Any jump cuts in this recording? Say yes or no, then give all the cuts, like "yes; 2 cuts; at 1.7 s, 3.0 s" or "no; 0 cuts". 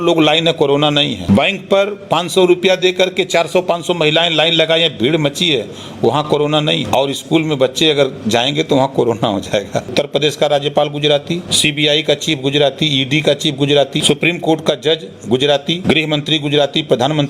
yes; 6 cuts; at 1.2 s, 6.8 s, 9.9 s, 11.5 s, 14.0 s, 15.8 s